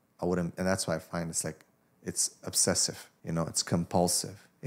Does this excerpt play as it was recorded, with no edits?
no; 1 cut; at 3.1 s

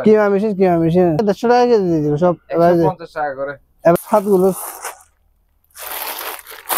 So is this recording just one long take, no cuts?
no; 2 cuts; at 1.2 s, 4.0 s

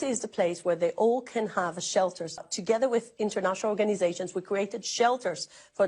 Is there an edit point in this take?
yes; 1 cut; at 2.4 s

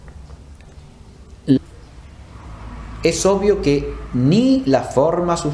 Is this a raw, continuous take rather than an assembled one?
yes; 0 cuts

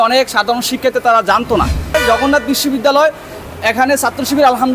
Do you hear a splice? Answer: yes; 1 cut; at 1.9 s

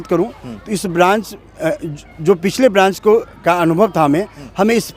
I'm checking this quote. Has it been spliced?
no; 0 cuts

